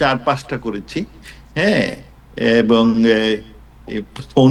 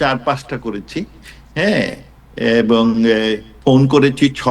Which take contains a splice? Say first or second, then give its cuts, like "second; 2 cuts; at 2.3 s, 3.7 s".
second; 1 cut; at 3.5 s